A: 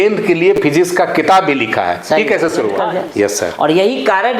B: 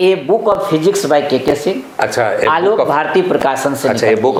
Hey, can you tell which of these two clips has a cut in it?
A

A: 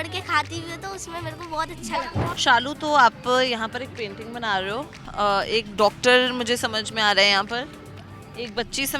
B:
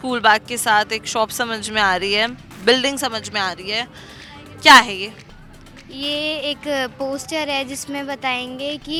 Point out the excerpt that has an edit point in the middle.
A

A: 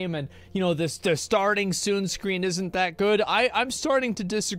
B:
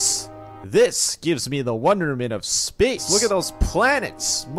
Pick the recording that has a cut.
B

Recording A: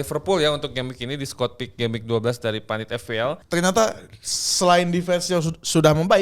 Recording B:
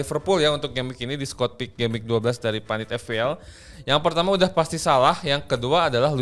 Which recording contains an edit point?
A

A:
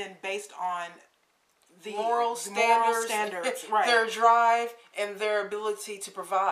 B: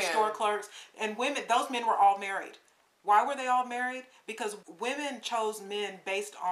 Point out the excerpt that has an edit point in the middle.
B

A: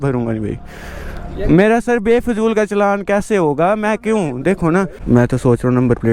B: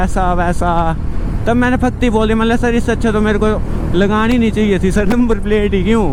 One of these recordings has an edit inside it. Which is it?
A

